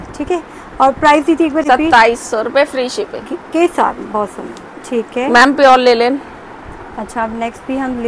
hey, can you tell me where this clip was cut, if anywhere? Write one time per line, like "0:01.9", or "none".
none